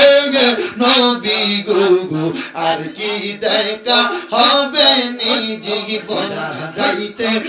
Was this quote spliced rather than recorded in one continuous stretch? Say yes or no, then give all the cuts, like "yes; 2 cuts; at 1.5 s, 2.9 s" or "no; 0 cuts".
yes; 1 cut; at 6.4 s